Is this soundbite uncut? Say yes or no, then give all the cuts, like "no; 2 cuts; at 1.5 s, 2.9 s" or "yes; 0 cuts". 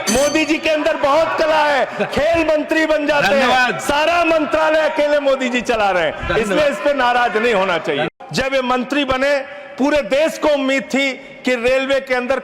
no; 1 cut; at 8.1 s